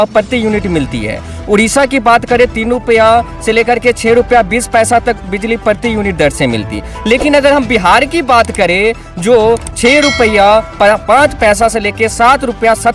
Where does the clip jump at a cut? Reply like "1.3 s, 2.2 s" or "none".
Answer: none